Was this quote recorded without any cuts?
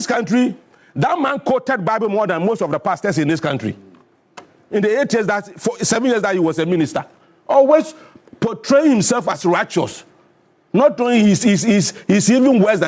yes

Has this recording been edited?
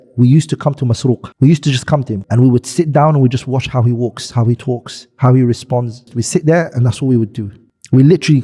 no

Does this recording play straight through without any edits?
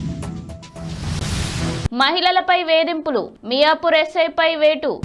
yes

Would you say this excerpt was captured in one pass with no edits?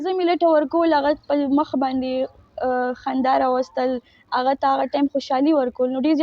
yes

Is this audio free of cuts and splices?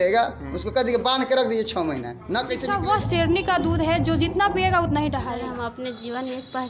no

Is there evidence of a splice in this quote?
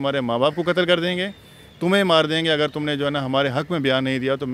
no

